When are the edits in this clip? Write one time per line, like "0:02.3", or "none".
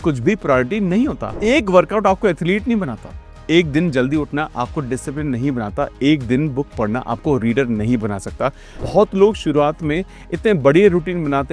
0:01.3
0:08.8